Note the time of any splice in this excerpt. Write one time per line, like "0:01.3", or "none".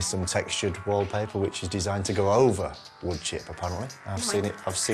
none